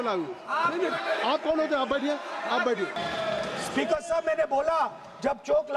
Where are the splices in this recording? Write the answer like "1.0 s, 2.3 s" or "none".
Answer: 2.9 s